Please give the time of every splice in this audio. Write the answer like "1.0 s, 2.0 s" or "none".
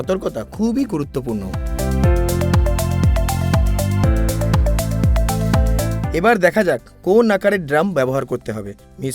1.7 s, 6.0 s